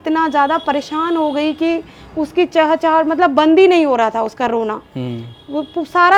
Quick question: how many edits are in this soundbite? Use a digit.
0